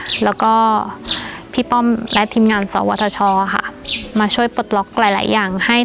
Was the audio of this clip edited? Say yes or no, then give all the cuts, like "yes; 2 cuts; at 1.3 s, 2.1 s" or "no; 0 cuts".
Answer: no; 0 cuts